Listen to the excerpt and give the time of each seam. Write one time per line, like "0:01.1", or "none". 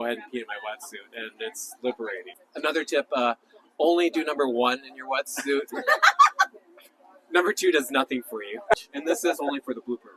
0:02.2
0:08.7